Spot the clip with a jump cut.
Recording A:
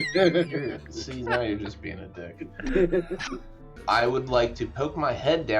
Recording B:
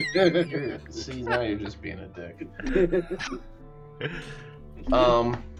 A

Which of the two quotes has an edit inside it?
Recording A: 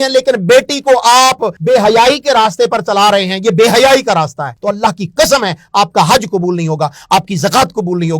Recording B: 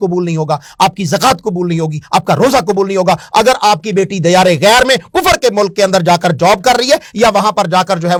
A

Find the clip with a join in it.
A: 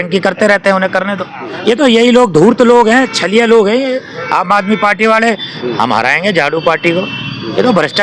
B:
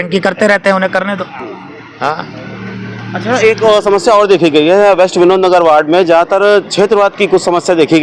A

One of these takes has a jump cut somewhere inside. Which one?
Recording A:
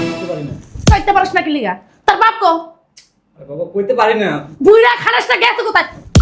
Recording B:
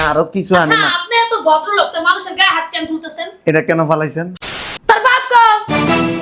B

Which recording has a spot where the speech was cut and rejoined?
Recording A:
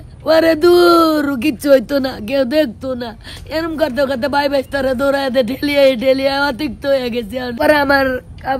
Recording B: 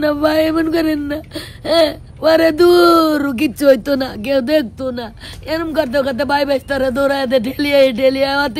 A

